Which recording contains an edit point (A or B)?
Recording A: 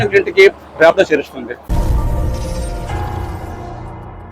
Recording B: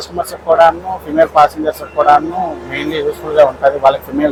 A